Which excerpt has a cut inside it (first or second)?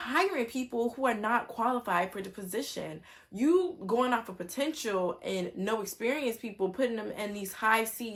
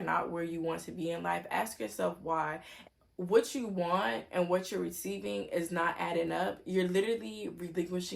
second